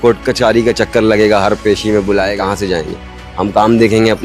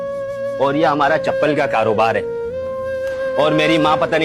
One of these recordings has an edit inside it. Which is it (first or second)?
first